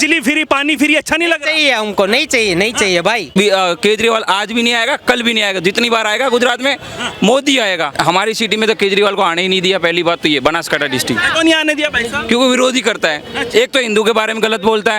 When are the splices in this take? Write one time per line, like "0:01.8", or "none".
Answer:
0:03.3
0:07.9
0:11.3